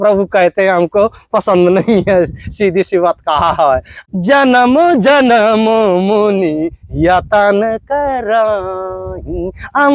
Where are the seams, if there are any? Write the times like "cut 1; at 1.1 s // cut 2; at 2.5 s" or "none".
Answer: cut 1; at 3.9 s